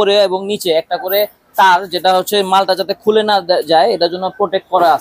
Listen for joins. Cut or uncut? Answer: uncut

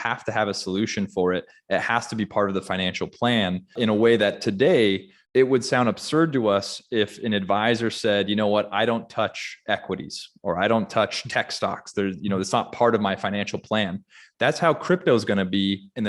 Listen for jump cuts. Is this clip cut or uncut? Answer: cut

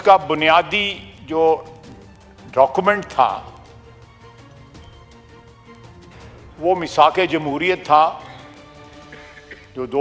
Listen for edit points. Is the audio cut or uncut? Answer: cut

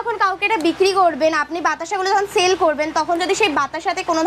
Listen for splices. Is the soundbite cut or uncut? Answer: uncut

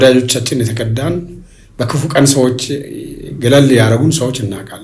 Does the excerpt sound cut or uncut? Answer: uncut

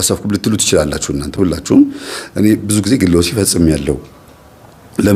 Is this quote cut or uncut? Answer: uncut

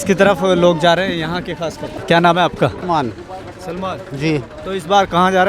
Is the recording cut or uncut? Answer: cut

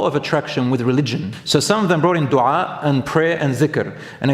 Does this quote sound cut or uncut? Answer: cut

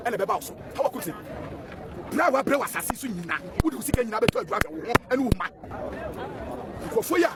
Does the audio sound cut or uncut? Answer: uncut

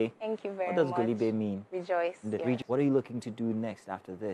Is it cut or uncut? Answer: cut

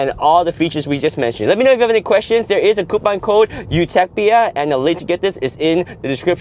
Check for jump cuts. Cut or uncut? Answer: uncut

